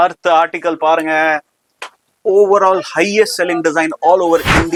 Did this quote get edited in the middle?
no; 0 cuts

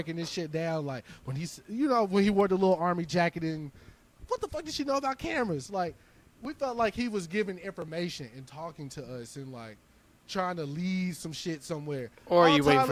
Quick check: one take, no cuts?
yes; 0 cuts

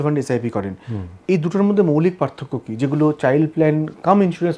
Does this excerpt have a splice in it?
no; 0 cuts

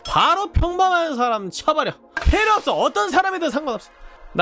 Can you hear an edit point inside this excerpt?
yes; 1 cut; at 2.1 s

